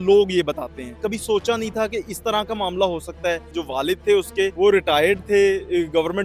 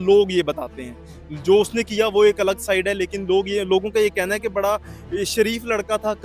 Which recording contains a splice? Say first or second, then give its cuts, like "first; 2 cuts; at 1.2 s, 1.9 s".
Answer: first; 3 cuts; at 1.0 s, 3.6 s, 4.5 s